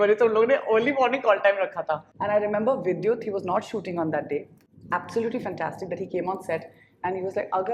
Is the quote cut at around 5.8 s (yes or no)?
no